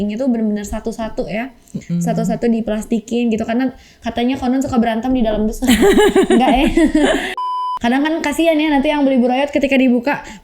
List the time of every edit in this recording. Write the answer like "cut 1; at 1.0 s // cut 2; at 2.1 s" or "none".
cut 1; at 7.3 s